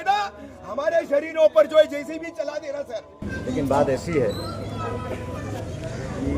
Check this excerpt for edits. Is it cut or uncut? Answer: cut